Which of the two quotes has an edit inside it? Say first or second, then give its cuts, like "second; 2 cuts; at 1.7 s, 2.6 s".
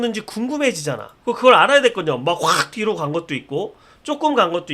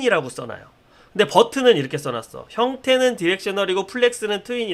first; 1 cut; at 1.1 s